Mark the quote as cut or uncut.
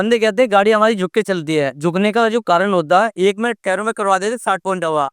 cut